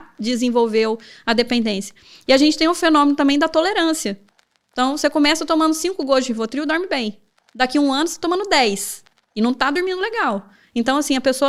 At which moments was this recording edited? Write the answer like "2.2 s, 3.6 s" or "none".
none